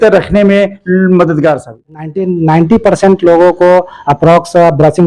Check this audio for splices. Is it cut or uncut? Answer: cut